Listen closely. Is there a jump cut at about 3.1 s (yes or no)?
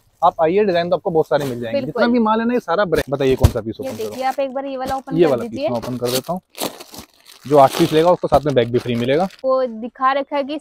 yes